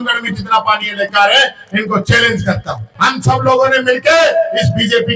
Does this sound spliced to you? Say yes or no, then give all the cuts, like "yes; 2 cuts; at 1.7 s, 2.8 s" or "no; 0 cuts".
yes; 1 cut; at 2.9 s